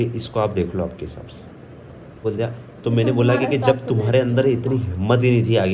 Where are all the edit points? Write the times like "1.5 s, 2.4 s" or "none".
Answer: 2.2 s